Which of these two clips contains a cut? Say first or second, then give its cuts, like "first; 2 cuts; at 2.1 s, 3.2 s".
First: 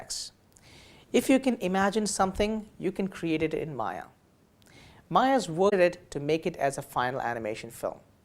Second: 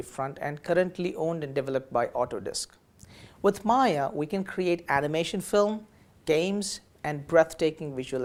first; 1 cut; at 5.7 s